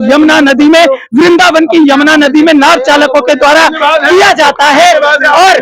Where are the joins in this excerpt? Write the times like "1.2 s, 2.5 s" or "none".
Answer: none